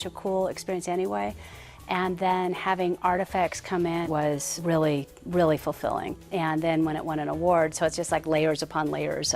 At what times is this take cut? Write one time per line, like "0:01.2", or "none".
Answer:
0:04.0